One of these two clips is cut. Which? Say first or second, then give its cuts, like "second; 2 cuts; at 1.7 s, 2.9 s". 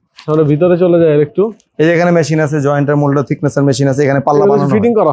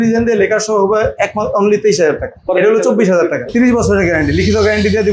second; 2 cuts; at 2.4 s, 3.5 s